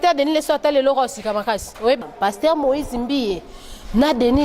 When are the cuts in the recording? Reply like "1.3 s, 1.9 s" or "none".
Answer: 2.1 s